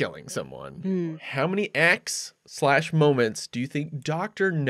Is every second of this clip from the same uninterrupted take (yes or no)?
no